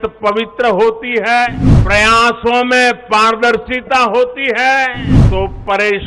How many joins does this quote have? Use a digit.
2